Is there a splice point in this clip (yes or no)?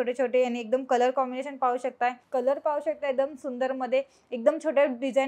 yes